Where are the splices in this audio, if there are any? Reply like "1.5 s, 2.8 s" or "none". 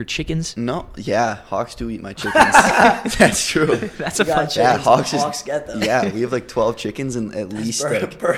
none